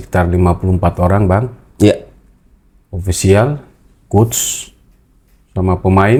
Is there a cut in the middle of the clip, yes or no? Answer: no